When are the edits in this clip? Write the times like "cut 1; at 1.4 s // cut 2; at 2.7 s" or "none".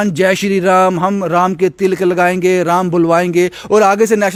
none